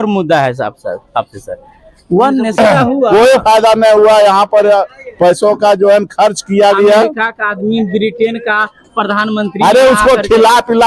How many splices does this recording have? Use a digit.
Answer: 1